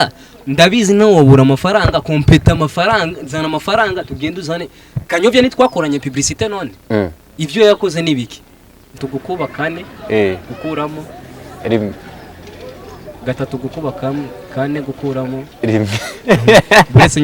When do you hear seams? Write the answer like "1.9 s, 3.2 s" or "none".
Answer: 9.0 s